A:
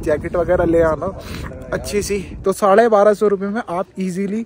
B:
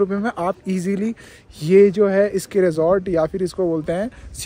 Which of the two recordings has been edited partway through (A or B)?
A